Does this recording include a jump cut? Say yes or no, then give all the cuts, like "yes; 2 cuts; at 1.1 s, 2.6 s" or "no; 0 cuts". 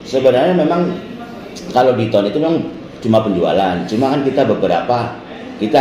no; 0 cuts